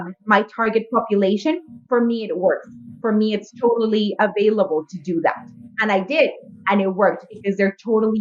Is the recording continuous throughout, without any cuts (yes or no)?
yes